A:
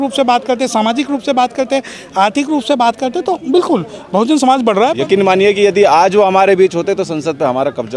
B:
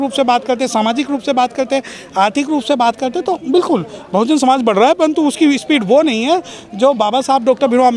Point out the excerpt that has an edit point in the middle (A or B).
A